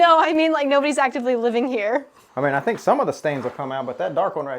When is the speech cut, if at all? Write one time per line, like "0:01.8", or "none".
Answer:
0:02.2